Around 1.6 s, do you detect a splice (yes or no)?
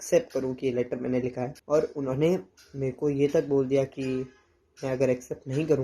yes